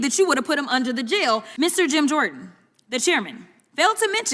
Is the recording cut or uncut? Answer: cut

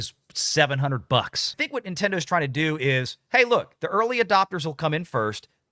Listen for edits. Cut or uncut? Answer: cut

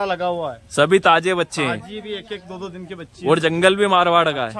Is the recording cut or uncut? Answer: uncut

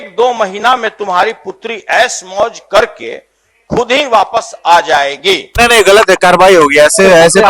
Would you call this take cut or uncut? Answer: cut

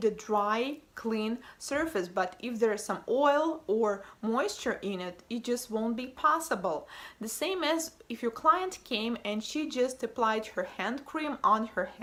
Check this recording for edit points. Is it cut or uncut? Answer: uncut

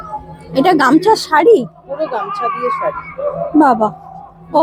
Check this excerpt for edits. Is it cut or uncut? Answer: uncut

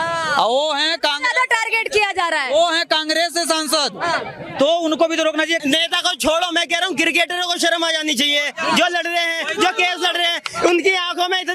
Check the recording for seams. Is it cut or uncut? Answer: cut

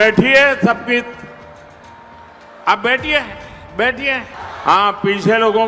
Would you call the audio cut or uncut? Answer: cut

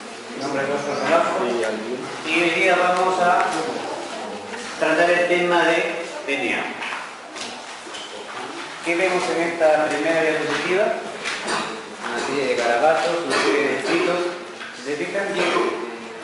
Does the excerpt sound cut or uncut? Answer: uncut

